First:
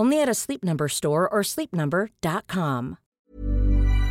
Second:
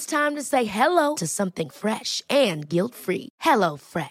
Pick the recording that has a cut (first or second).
first